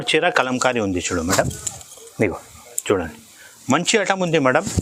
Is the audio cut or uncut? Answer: uncut